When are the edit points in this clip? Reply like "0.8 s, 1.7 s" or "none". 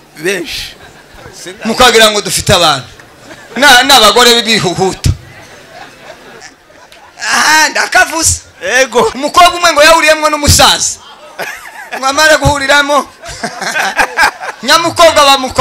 6.5 s, 9.2 s